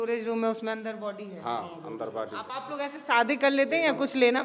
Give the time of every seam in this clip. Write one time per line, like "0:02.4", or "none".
0:02.5